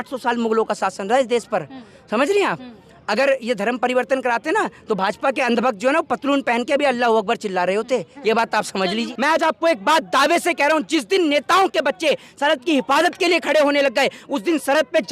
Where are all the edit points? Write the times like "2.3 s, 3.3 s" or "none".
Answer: 9.1 s